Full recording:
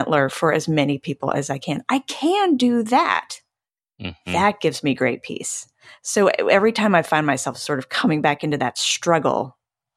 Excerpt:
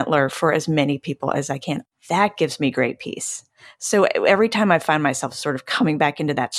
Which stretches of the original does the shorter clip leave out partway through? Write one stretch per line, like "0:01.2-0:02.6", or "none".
0:01.8-0:04.0